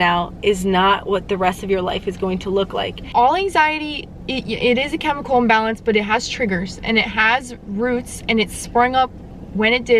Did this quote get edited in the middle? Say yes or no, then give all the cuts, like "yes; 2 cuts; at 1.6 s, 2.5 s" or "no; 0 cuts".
yes; 1 cut; at 3.1 s